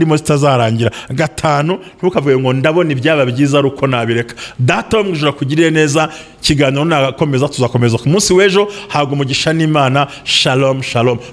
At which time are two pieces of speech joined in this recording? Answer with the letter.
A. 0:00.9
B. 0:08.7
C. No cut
C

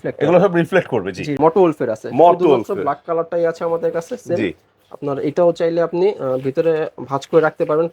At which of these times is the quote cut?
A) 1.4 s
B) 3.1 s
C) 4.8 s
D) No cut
A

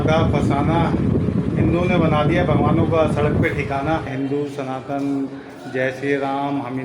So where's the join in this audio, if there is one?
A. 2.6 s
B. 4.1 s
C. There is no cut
B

